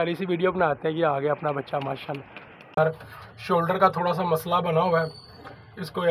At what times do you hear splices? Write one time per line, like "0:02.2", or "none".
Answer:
0:02.8

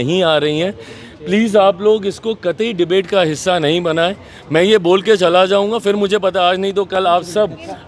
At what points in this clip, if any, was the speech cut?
none

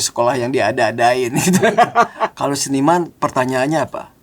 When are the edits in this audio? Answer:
0:02.2

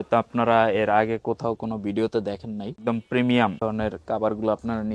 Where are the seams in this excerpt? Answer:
0:02.7
0:03.6

